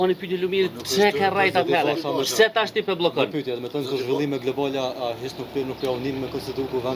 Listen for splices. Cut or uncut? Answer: uncut